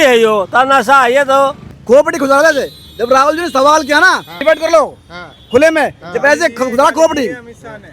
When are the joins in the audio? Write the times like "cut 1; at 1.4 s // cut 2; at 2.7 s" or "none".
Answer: cut 1; at 1.7 s // cut 2; at 4.3 s